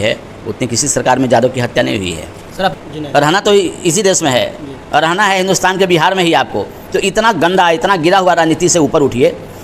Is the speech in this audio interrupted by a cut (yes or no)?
yes